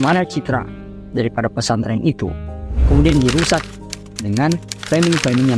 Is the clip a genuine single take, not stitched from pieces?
yes; 0 cuts

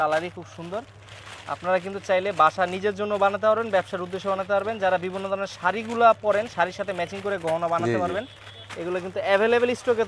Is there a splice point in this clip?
no; 0 cuts

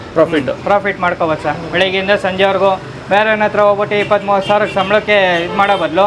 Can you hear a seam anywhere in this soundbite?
no; 0 cuts

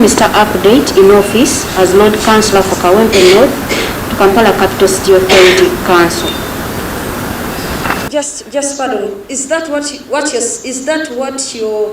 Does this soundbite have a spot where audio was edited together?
yes; 1 cut; at 8.1 s

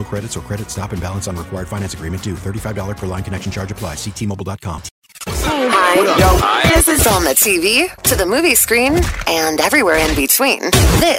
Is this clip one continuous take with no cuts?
no; 1 cut; at 5.4 s

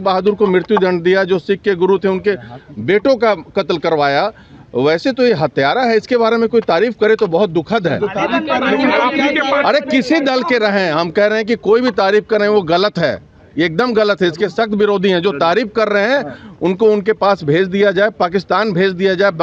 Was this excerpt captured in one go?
yes; 0 cuts

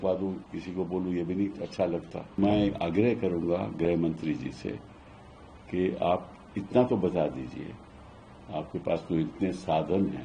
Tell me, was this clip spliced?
yes; 1 cut; at 2.4 s

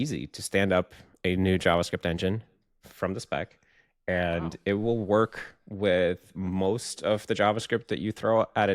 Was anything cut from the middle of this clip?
no; 0 cuts

